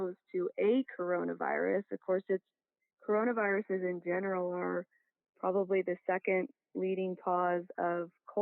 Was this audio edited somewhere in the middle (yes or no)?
no